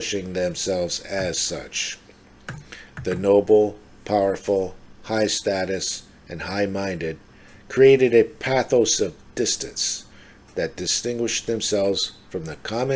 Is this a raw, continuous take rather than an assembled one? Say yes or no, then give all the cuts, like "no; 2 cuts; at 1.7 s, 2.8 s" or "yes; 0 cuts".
yes; 0 cuts